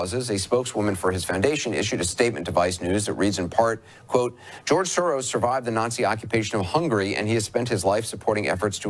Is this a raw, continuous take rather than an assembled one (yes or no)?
yes